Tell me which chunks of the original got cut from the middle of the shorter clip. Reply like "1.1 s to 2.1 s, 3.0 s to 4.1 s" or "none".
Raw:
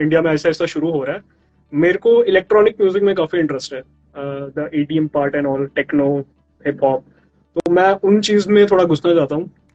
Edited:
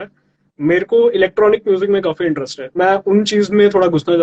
3.9 s to 7.7 s